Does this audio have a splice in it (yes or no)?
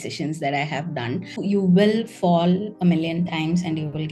yes